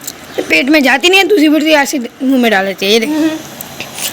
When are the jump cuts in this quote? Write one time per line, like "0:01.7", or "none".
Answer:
0:03.1